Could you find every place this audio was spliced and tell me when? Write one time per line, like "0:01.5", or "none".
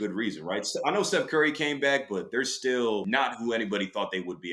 0:03.0